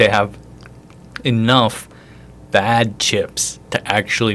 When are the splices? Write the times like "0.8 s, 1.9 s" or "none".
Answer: none